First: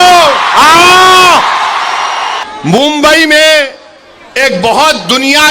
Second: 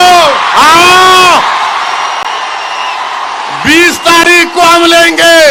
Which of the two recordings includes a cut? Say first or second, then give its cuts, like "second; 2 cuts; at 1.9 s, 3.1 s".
first; 1 cut; at 2.4 s